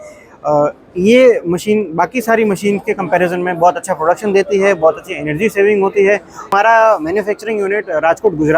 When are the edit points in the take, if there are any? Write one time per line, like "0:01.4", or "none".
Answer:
0:06.5